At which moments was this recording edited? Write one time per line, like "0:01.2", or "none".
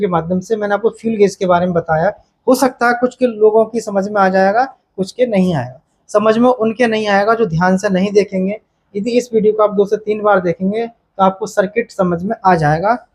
none